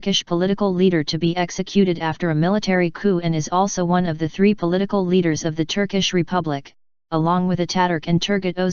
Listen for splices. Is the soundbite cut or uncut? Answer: cut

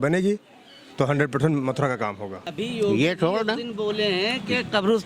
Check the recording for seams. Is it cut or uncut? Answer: cut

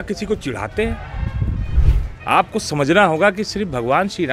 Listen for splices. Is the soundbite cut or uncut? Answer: cut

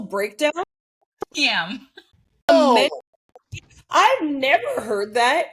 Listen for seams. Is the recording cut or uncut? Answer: cut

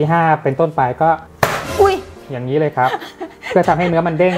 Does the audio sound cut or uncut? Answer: cut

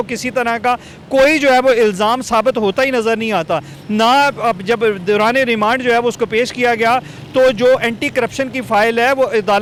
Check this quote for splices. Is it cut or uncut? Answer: uncut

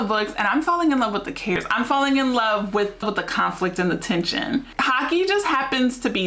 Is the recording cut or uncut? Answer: cut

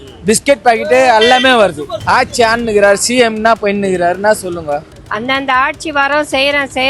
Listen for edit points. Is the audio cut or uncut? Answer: cut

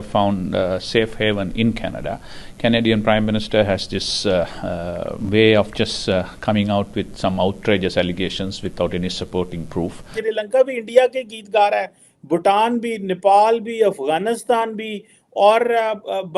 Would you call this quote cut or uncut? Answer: cut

